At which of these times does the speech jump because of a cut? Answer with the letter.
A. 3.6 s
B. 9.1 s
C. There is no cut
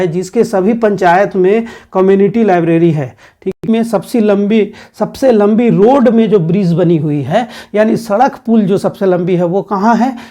A